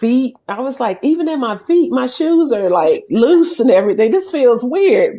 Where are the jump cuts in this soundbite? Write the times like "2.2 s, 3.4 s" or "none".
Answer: none